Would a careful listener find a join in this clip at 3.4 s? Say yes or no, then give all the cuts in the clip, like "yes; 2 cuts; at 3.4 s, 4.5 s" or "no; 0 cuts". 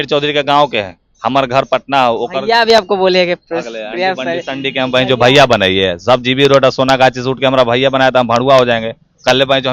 no; 0 cuts